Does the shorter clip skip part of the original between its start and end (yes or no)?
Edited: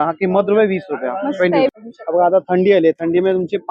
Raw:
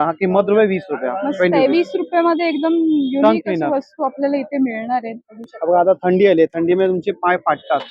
yes